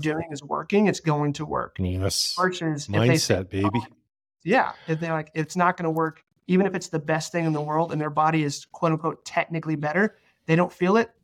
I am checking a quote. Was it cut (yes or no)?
no